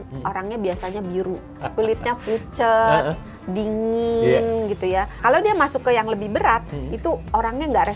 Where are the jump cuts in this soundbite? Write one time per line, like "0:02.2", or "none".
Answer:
0:01.5
0:05.2